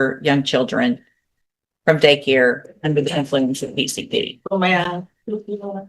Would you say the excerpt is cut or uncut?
uncut